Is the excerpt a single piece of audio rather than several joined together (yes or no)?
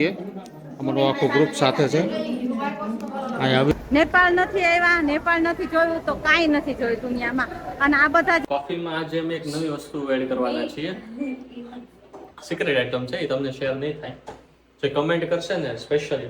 no